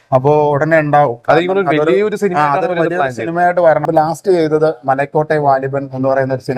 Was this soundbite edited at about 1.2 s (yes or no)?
no